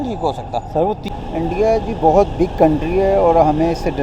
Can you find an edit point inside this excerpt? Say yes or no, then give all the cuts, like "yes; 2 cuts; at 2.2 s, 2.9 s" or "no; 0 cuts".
yes; 1 cut; at 1.2 s